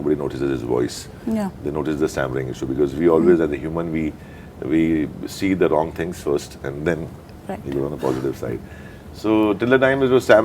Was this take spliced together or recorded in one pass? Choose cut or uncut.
uncut